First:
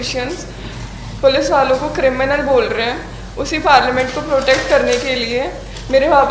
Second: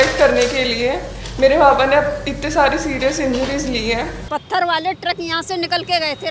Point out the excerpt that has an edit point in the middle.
second; 1 cut; at 4.2 s

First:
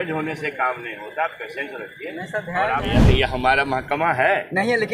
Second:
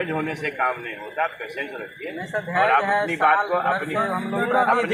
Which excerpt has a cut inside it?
first; 1 cut; at 2.8 s

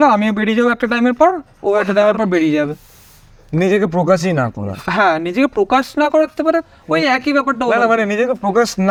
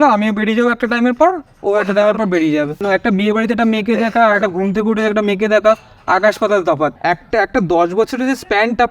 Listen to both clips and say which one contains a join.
second; 2 cuts; at 2.8 s, 7.0 s

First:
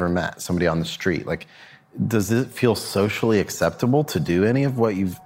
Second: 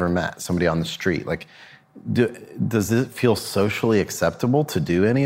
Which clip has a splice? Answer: first; 1 cut; at 1.8 s

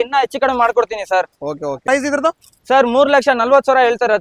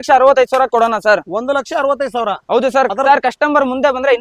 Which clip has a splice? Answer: first; 1 cut; at 1.8 s

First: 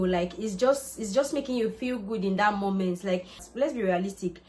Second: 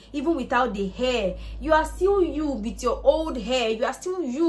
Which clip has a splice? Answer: first; 1 cut; at 3.4 s

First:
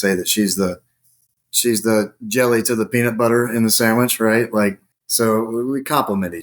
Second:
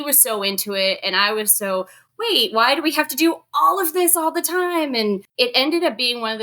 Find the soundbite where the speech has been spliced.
second; 1 cut; at 5.3 s

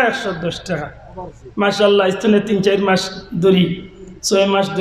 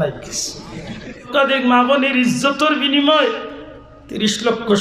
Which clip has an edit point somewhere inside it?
second; 1 cut; at 1.3 s

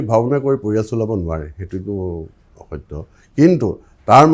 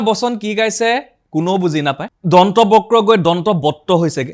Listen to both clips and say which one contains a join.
second; 1 cut; at 2.1 s

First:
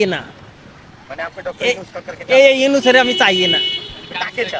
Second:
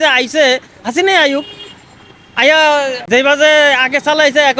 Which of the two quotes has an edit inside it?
second; 1 cut; at 3.0 s

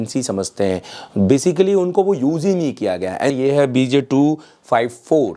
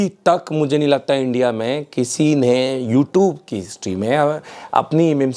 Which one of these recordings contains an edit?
first; 1 cut; at 3.3 s

